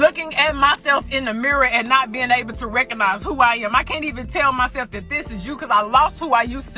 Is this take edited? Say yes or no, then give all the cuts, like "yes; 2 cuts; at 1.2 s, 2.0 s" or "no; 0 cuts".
no; 0 cuts